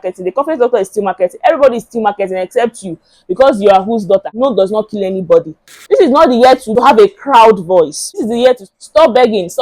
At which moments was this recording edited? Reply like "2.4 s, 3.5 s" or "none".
4.3 s, 5.7 s, 6.7 s, 8.0 s